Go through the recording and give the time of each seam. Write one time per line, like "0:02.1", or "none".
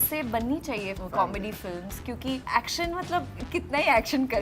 0:00.9
0:02.4